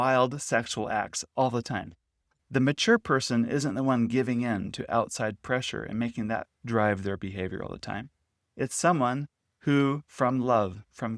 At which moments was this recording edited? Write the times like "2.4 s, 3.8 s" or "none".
none